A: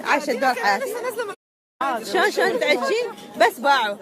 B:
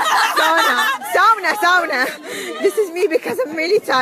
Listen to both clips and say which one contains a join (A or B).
A